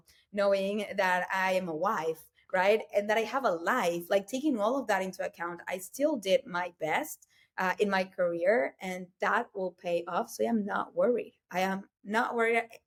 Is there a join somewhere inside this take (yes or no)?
no